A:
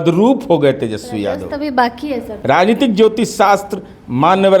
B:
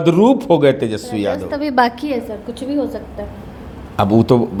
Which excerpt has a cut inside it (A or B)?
A